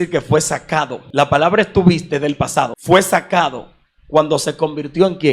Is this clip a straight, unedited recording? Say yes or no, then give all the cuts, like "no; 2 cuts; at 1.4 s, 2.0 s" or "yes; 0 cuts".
no; 2 cuts; at 1.0 s, 2.8 s